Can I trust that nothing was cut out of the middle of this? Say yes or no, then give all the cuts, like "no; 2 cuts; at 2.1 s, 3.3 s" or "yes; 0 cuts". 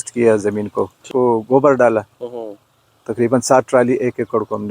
no; 1 cut; at 1.0 s